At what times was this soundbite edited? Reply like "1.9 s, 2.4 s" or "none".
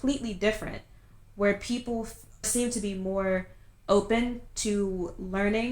2.5 s